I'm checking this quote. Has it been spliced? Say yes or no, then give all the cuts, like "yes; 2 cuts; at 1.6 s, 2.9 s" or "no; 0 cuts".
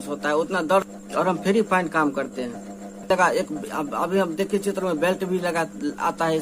yes; 2 cuts; at 0.9 s, 3.1 s